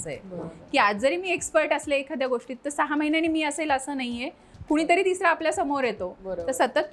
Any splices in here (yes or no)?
no